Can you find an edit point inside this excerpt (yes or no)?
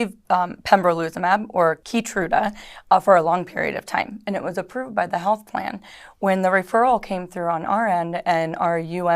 yes